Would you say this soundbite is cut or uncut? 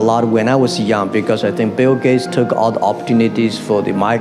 uncut